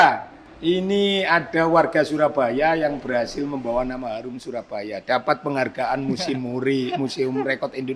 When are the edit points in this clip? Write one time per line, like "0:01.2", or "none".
none